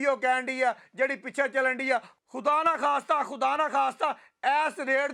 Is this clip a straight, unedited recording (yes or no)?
yes